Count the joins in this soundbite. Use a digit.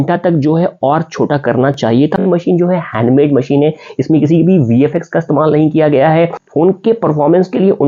2